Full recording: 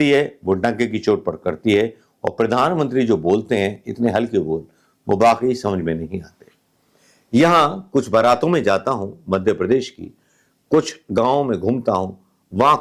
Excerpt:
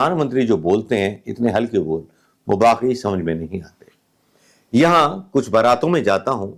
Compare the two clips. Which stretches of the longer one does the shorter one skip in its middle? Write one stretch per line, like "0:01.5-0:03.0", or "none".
none